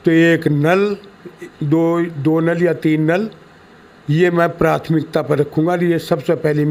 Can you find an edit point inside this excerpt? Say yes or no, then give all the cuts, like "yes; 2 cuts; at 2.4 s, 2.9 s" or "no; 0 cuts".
no; 0 cuts